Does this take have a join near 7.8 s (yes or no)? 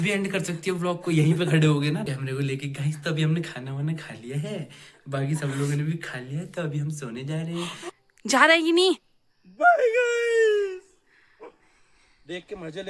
yes